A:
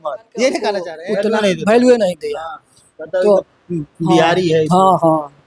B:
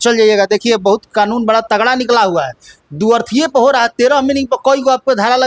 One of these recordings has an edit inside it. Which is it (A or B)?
A